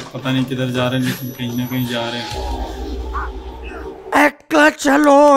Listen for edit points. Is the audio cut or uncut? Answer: uncut